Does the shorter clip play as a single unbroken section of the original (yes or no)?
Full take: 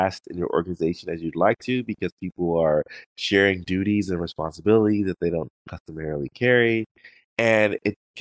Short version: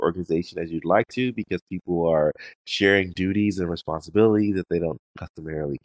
yes